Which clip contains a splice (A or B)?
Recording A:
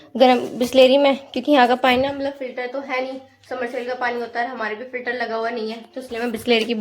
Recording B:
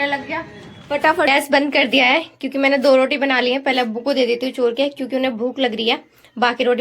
B